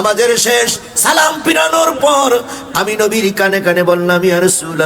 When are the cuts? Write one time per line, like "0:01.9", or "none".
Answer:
none